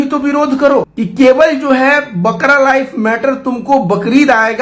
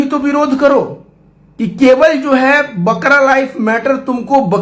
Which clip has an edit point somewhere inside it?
first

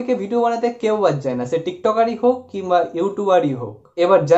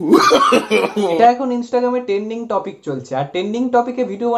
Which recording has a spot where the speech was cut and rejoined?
second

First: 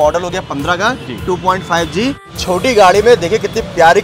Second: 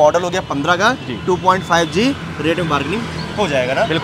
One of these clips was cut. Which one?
first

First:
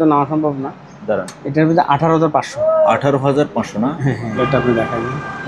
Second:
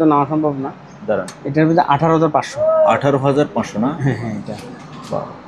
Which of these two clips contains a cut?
first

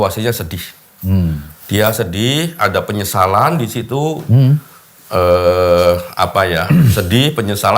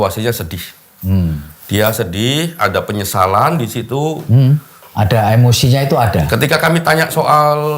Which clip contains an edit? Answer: second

